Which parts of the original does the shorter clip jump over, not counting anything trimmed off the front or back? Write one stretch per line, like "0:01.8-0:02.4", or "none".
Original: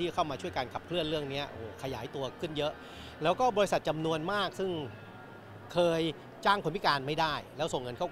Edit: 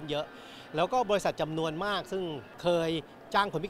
0:04.9-0:05.6